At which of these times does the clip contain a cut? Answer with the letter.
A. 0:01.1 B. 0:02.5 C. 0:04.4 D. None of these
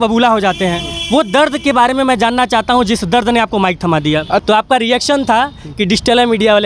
C